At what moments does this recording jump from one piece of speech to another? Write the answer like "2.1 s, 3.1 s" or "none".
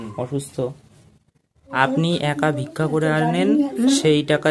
1.7 s